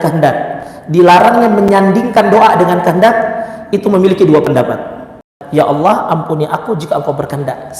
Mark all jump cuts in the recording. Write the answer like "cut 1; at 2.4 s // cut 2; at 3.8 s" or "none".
cut 1; at 5.4 s